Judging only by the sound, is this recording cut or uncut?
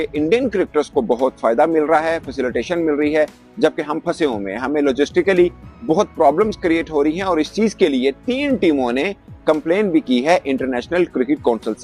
uncut